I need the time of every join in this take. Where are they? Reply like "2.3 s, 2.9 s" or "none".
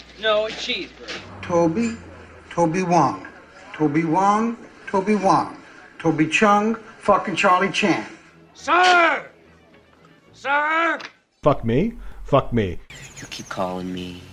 8.6 s